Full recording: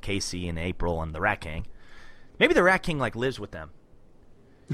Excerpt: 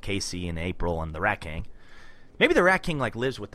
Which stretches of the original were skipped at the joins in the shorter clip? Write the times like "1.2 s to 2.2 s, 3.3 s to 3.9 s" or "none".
none